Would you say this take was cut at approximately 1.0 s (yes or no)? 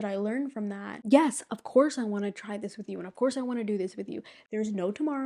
yes